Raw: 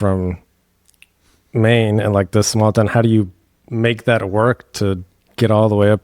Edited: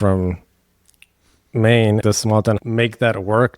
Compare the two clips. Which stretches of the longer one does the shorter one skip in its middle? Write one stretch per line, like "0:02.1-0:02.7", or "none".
0:02.1-0:03.1